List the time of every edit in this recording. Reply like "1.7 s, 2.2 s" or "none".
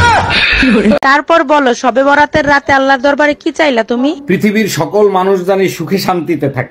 1.0 s